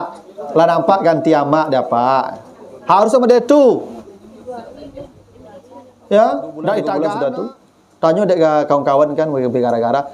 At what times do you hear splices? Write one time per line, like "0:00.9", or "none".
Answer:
0:07.0